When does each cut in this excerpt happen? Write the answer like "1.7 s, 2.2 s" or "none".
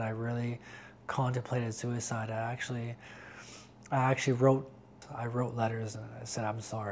5.0 s